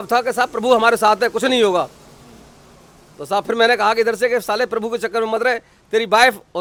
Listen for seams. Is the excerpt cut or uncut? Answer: uncut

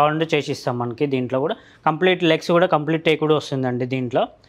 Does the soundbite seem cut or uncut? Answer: uncut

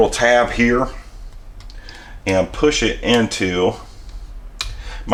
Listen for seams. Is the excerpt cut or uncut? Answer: uncut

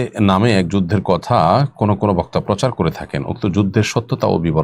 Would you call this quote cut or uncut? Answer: uncut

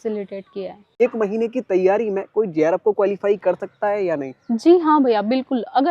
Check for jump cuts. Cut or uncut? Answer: cut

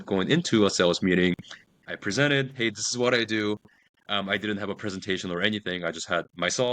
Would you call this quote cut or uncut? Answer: uncut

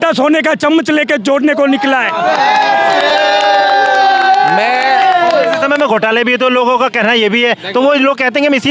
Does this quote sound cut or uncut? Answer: uncut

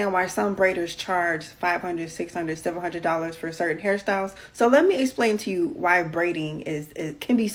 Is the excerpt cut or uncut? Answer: uncut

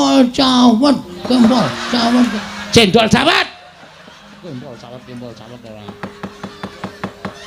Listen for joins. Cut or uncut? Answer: uncut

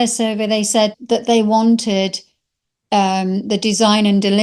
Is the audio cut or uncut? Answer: cut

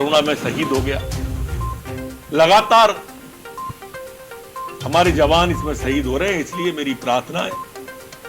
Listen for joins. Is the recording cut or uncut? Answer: cut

